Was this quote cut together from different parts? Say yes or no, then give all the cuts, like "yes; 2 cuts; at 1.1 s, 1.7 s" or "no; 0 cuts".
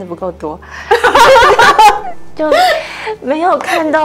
no; 0 cuts